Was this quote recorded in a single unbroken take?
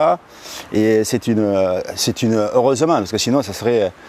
no; 1 cut; at 2.2 s

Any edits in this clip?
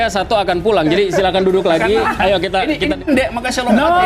yes; 1 cut; at 3.0 s

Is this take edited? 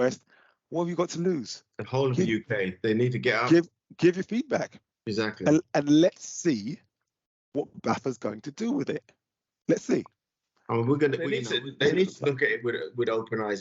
yes; 1 cut; at 11.4 s

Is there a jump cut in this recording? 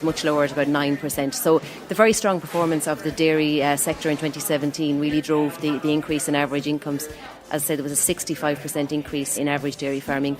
yes; 1 cut; at 9.3 s

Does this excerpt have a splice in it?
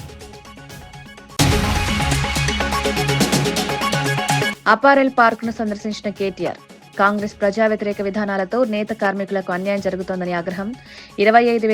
yes; 2 cuts; at 1.3 s, 4.5 s

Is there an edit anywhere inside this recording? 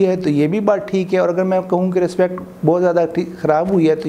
no; 0 cuts

